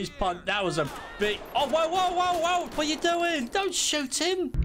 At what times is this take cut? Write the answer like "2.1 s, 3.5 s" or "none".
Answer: none